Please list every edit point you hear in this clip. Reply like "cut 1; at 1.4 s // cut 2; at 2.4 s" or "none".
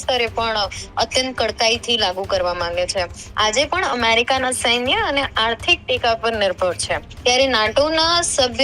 cut 1; at 3.2 s // cut 2; at 7.1 s